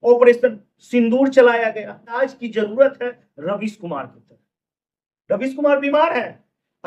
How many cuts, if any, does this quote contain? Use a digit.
1